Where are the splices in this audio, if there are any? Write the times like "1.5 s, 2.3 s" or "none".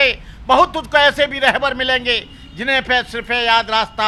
none